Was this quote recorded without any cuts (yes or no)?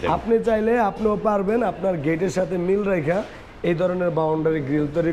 yes